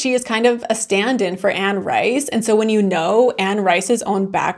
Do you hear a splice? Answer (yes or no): no